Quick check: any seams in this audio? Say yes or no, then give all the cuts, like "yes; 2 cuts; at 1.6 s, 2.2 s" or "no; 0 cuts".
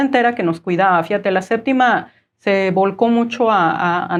no; 0 cuts